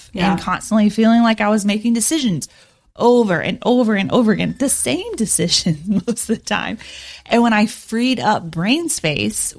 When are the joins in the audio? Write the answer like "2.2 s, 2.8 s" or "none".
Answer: none